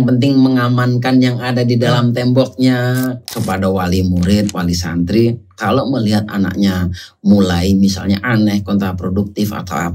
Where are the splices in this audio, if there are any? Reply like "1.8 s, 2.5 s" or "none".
3.3 s